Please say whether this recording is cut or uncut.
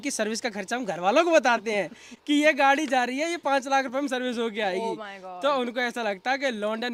uncut